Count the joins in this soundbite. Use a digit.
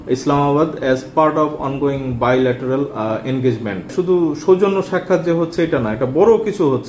1